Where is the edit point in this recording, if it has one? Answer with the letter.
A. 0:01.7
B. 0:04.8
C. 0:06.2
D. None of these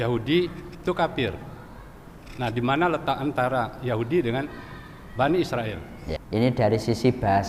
C